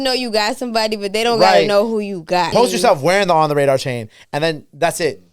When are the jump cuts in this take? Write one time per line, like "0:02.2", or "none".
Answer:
0:02.5